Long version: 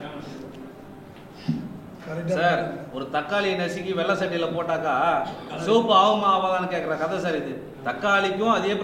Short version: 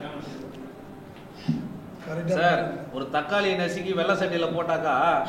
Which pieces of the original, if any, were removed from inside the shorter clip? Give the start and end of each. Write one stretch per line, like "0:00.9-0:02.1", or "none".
none